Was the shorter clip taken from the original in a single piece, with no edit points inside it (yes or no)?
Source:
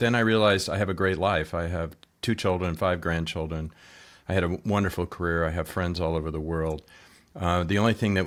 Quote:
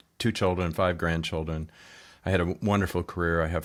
yes